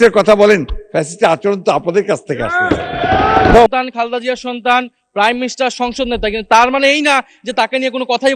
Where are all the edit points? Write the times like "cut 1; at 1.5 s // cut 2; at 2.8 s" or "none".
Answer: cut 1; at 3.7 s